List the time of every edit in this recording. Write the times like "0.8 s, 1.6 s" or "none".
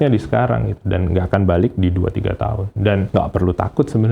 1.3 s, 3.0 s